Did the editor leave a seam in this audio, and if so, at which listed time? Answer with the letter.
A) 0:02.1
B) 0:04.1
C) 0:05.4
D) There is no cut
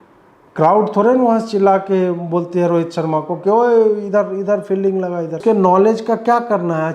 C